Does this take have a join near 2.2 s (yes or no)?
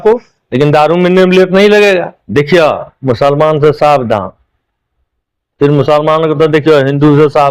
yes